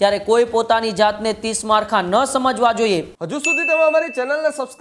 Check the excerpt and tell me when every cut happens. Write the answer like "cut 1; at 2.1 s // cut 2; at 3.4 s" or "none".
cut 1; at 3.2 s